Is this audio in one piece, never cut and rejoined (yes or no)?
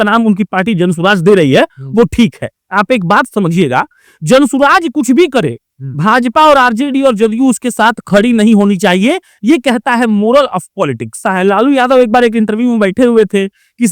no